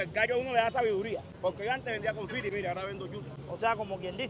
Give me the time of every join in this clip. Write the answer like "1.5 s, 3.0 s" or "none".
none